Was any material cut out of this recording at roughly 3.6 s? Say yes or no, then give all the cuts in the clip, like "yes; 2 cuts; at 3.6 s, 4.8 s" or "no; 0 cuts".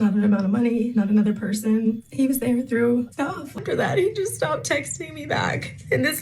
yes; 1 cut; at 3.6 s